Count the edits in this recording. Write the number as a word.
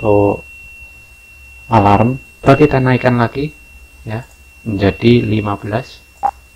one